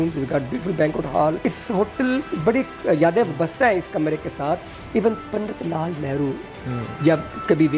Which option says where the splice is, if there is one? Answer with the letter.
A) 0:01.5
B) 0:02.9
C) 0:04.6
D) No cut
A